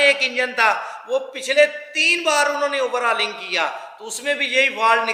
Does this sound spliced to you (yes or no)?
no